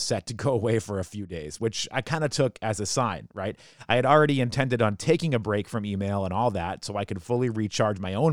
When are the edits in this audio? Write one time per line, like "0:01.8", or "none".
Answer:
none